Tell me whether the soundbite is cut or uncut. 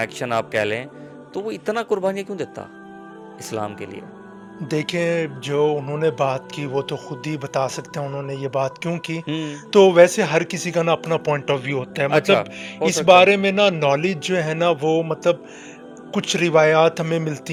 uncut